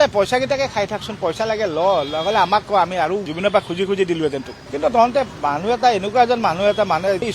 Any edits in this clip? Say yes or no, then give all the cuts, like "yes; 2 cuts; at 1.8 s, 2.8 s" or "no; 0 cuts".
no; 0 cuts